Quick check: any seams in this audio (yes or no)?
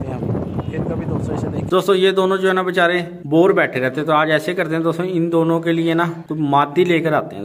yes